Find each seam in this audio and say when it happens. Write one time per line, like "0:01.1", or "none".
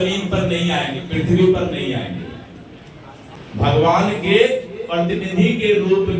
0:03.3